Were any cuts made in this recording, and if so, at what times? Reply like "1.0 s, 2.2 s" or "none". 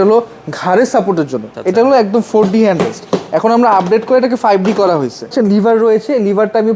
1.5 s, 5.3 s